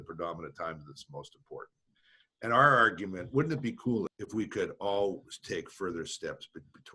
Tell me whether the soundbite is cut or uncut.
cut